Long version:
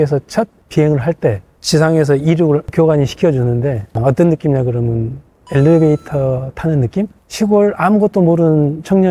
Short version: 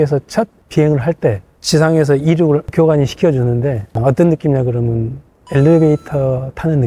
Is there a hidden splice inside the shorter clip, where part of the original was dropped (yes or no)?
no